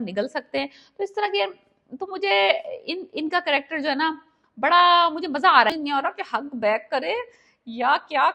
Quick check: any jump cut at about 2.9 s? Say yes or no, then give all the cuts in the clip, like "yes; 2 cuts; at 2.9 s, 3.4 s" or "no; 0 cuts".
no; 1 cut; at 5.7 s